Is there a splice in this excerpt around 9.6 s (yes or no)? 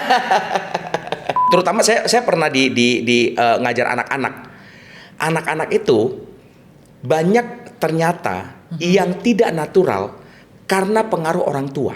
no